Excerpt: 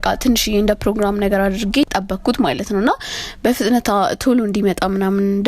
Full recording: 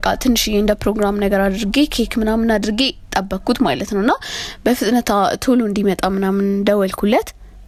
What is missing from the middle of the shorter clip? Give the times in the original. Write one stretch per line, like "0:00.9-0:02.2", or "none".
0:01.9-0:03.1